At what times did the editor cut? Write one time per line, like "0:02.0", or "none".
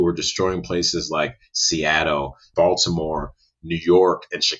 0:02.4